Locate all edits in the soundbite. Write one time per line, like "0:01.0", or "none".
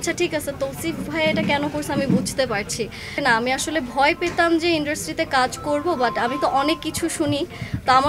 0:03.1